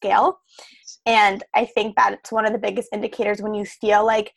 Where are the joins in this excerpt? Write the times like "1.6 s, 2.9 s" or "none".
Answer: 2.3 s